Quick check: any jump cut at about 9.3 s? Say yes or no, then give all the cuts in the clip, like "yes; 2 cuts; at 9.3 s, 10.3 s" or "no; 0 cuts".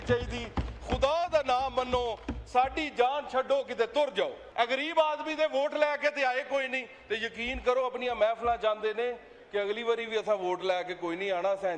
no; 1 cut; at 4.4 s